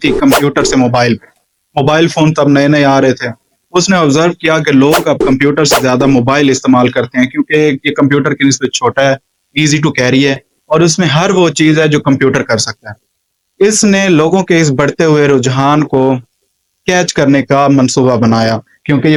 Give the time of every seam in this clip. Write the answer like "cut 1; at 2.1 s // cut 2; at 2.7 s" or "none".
none